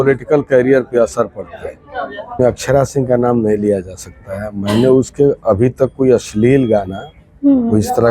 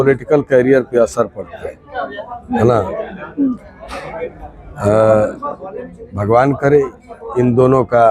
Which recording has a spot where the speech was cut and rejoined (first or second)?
first